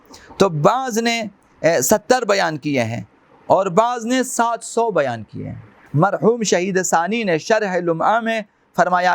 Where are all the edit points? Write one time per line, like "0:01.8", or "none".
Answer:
0:05.8